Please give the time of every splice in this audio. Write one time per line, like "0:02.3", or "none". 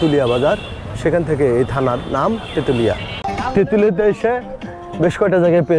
0:03.3